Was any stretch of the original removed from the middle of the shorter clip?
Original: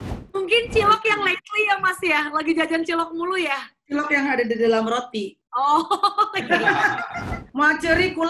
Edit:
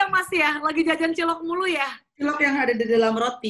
no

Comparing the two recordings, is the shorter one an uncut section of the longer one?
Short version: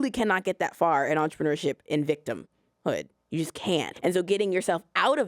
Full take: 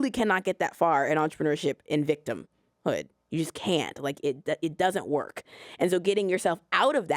no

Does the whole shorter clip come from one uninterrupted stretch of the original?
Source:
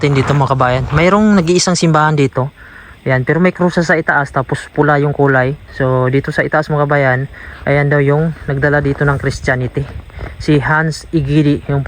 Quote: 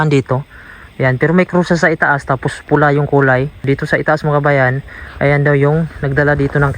no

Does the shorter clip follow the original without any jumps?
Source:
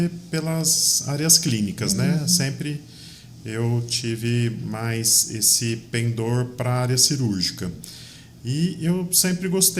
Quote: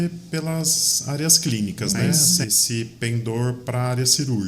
no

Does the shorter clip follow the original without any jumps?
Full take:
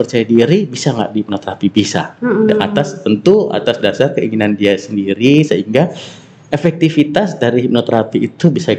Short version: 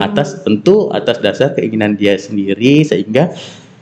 yes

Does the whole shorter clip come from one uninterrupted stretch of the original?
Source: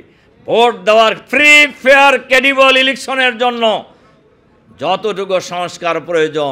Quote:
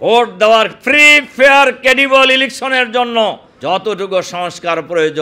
no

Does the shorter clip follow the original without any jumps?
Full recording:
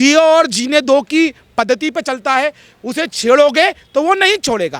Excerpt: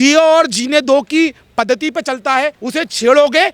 no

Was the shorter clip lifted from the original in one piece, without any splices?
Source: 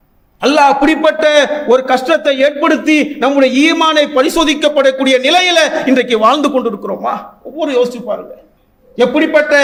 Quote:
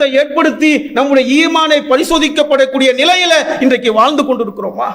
yes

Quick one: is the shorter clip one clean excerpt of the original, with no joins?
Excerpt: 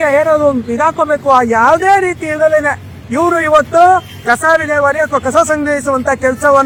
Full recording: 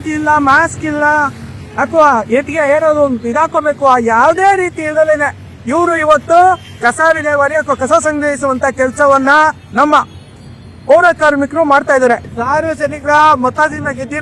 yes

